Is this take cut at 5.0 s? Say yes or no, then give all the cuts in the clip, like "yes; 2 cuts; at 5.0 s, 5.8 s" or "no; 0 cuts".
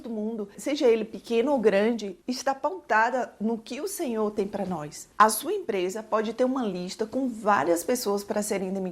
yes; 1 cut; at 5.0 s